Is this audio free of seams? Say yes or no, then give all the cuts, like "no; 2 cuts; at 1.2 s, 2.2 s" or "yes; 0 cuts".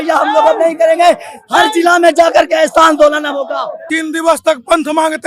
no; 1 cut; at 3.8 s